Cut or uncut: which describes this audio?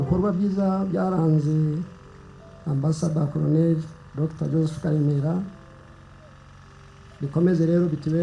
uncut